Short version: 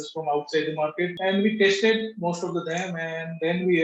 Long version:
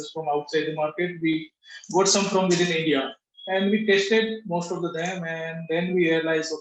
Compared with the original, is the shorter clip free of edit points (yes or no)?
no